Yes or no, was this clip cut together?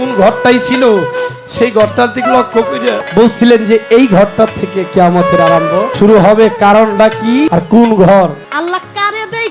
yes